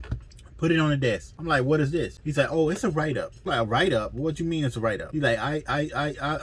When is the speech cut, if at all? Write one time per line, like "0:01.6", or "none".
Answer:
0:01.3
0:02.2
0:03.3
0:05.1